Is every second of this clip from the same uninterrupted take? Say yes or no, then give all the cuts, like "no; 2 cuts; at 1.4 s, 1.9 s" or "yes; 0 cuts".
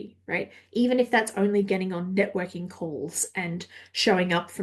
yes; 0 cuts